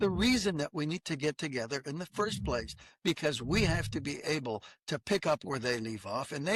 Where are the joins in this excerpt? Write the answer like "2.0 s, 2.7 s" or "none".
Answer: none